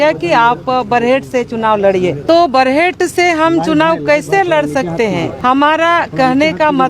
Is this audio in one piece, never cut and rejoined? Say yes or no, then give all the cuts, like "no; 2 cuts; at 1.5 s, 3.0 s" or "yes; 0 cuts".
no; 2 cuts; at 2.2 s, 5.3 s